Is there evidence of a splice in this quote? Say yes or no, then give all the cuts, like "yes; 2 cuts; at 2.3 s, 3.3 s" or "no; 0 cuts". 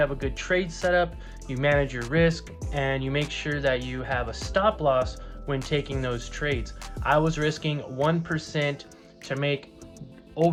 no; 0 cuts